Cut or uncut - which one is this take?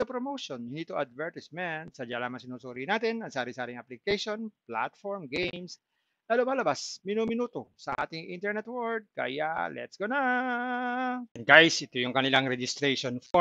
cut